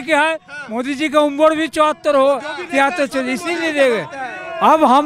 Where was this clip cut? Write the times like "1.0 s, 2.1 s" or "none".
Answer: none